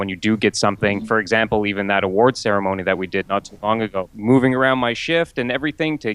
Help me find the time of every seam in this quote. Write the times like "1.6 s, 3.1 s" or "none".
1.0 s, 4.1 s